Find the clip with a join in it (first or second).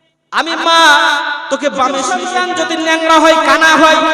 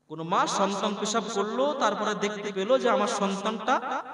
first